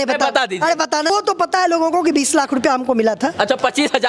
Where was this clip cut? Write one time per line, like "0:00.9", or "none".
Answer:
0:01.1